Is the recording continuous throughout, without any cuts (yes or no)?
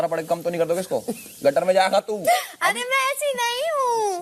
yes